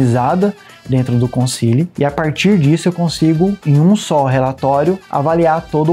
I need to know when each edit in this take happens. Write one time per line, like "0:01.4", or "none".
0:01.9
0:03.6
0:05.1